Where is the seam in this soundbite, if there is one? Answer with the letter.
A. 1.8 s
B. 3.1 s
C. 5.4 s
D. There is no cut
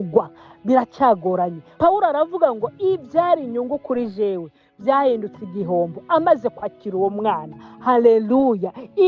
A